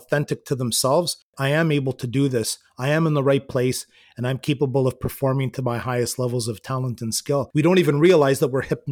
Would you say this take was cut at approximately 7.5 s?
yes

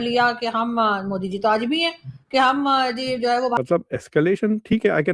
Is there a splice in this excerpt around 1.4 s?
no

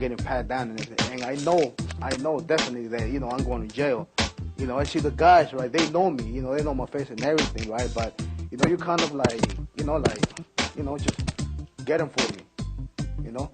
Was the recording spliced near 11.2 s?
yes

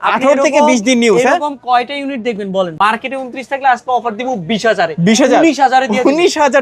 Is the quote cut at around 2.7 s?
yes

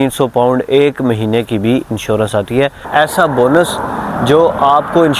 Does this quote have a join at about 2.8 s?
yes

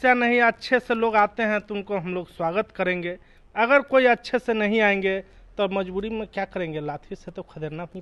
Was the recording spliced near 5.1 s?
no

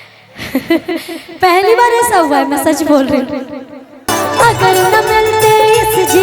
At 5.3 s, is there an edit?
no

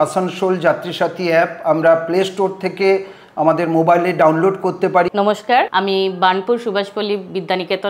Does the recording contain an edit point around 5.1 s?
yes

